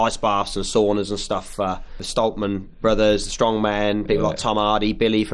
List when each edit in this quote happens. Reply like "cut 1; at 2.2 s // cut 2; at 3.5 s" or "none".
cut 1; at 2.0 s